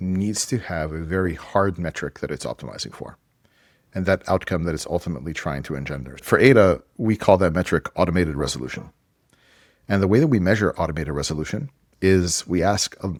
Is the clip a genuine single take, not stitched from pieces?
yes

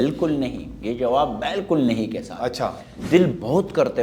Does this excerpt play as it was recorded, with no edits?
no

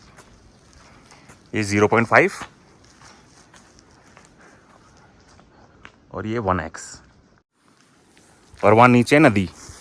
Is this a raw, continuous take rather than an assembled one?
no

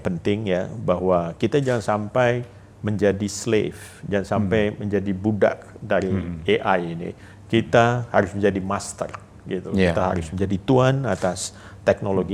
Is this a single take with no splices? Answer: yes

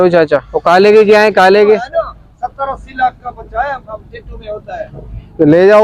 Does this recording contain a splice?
no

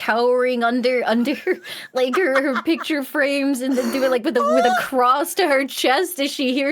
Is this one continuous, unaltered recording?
yes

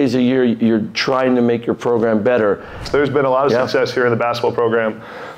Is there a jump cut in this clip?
yes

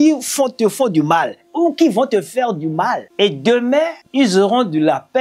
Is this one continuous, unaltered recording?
no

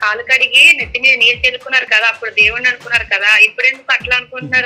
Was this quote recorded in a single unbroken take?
yes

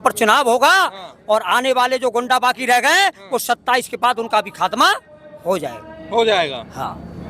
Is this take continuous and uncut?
yes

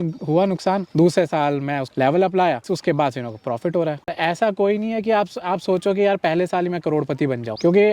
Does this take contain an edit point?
yes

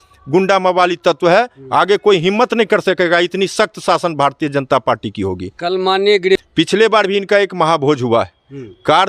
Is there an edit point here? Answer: yes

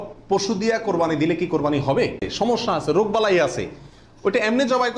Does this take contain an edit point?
yes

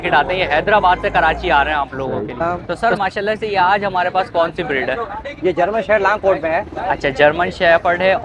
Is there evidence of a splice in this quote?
yes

